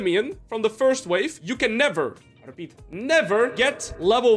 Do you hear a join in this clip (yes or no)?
yes